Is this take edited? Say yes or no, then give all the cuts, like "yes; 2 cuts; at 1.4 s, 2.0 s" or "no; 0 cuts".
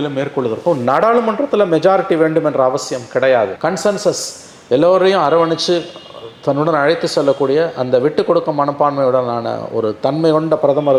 no; 0 cuts